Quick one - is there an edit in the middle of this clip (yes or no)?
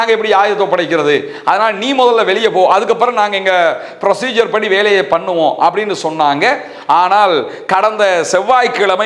no